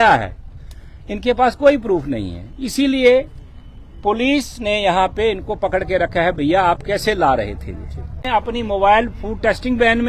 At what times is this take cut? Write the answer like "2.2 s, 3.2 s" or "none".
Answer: 8.2 s